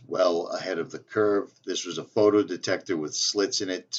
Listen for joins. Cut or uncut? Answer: uncut